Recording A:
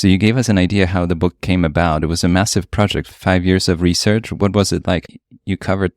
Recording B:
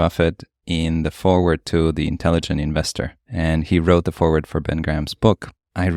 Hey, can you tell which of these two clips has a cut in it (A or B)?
A